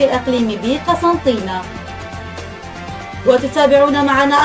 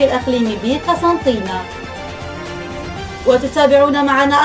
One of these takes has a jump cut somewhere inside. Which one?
second; 2 cuts; at 1.7 s, 3.0 s

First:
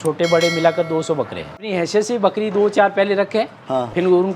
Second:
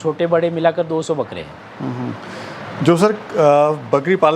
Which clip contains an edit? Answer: first; 1 cut; at 1.6 s

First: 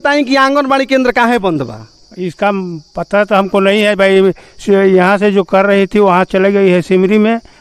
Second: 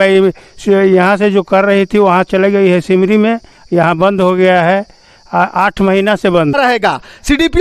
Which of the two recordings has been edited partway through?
second; 1 cut; at 6.5 s

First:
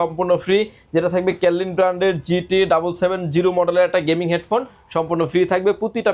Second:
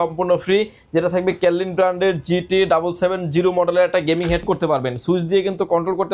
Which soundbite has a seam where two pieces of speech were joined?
second; 1 cut; at 4.4 s

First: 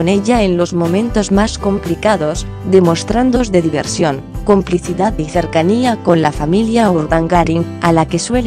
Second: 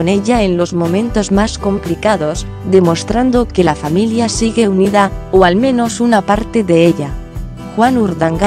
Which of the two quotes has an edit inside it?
second; 1 cut; at 3.4 s

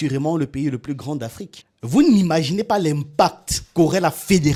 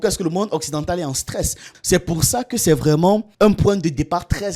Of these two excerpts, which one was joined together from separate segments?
second; 1 cut; at 1.7 s

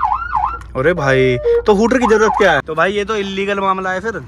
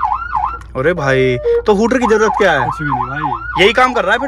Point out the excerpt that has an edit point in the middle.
first; 1 cut; at 2.6 s

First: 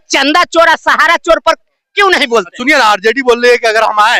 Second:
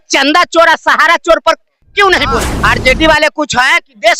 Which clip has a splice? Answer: second; 1 cut; at 2.5 s

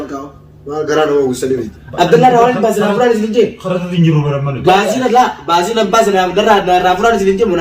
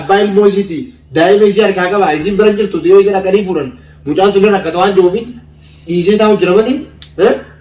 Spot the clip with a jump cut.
first; 1 cut; at 1.8 s

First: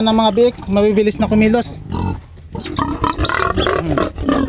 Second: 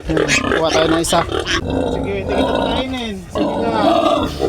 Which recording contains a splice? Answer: second; 1 cut; at 1.6 s

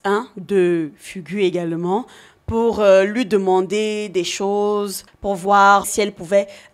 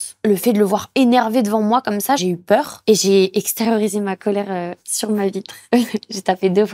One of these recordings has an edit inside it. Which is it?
first; 1 cut; at 5.0 s

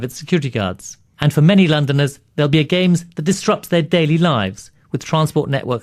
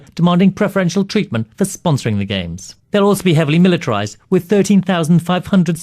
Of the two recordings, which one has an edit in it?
second; 1 cut; at 4.2 s

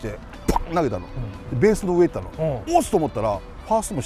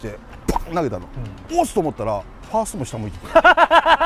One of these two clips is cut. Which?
second; 1 cut; at 1.4 s

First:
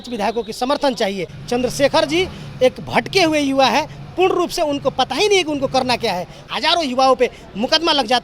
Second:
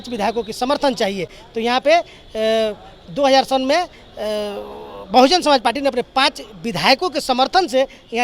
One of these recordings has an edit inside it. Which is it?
first; 2 cuts; at 1.3 s, 6.5 s

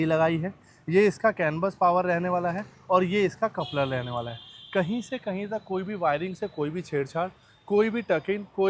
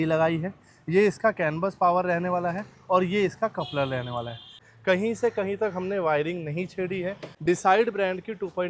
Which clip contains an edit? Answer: second; 2 cuts; at 4.6 s, 7.3 s

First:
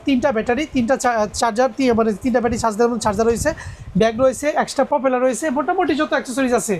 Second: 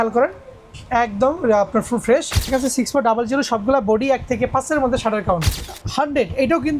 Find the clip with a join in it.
second; 2 cuts; at 2.4 s, 5.7 s

